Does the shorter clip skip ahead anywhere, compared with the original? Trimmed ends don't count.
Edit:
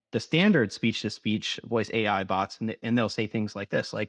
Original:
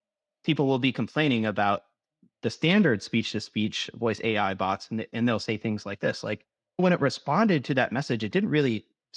no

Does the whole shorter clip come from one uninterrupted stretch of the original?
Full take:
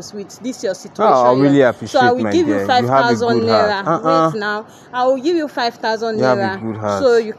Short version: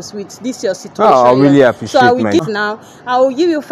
no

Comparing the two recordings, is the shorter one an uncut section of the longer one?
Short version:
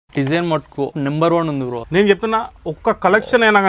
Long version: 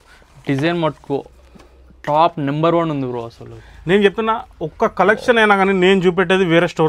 no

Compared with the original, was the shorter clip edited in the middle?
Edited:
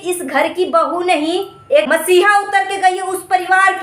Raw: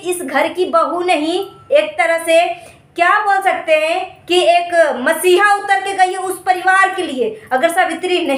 yes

